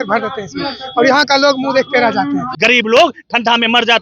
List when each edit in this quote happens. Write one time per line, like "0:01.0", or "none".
0:02.5